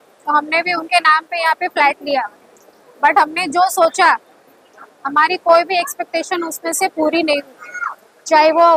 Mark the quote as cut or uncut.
uncut